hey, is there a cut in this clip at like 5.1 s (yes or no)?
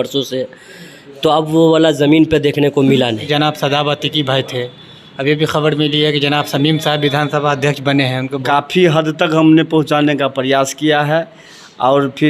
no